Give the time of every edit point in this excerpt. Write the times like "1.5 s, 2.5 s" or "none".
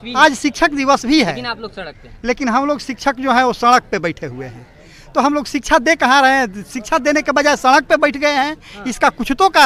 none